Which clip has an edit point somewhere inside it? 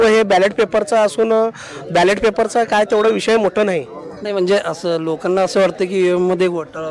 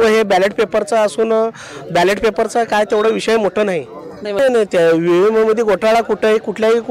second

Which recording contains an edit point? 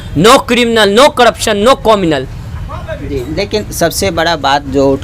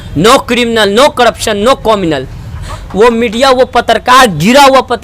second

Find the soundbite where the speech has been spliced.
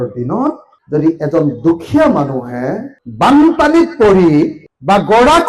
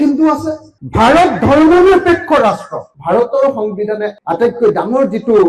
second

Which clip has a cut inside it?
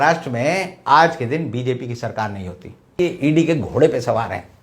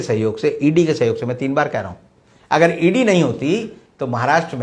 first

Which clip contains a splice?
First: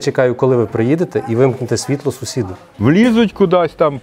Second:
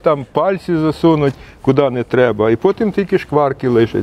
first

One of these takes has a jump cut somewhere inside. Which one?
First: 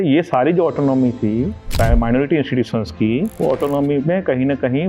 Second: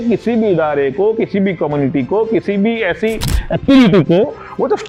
first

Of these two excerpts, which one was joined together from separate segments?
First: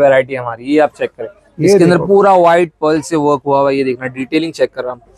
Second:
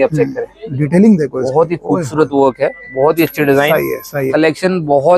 second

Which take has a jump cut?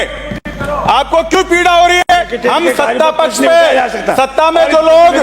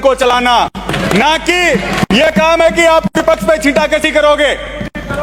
first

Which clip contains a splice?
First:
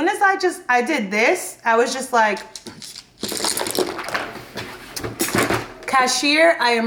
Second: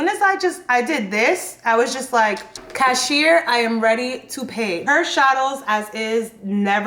second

